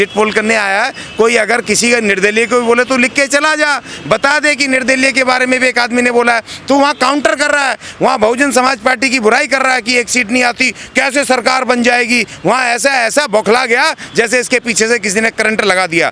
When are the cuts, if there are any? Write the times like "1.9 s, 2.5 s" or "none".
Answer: none